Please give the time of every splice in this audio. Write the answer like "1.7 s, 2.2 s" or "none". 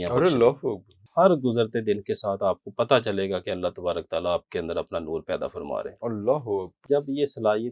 1.0 s, 6.8 s

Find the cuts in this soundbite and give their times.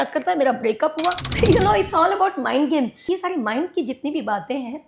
1.3 s, 3.1 s

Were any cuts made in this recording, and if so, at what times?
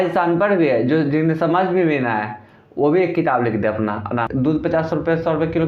4.3 s

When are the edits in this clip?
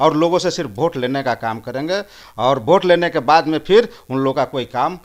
none

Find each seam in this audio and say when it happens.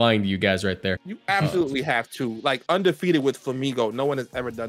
1.1 s

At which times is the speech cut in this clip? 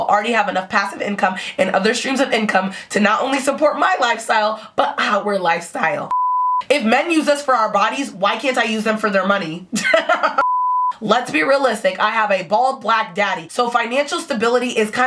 6.2 s, 10.8 s

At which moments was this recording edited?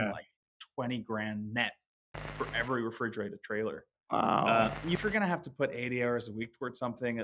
5.0 s

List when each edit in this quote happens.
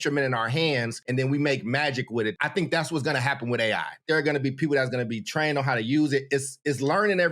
1.0 s, 2.3 s, 4.0 s

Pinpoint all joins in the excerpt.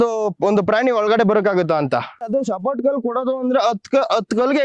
2.2 s

